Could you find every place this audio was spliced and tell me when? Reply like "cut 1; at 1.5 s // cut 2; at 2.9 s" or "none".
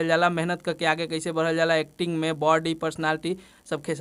none